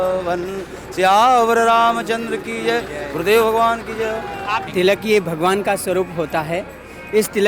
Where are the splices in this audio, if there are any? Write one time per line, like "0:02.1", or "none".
0:04.7